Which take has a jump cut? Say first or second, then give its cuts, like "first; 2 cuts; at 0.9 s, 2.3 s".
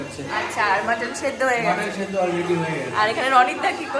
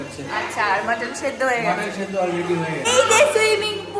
second; 1 cut; at 2.9 s